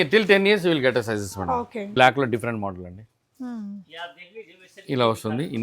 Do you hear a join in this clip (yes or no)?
yes